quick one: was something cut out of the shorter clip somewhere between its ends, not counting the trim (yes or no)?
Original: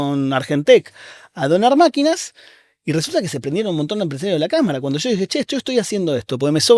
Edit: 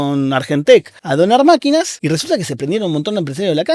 yes